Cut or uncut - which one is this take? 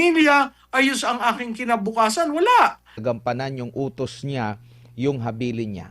cut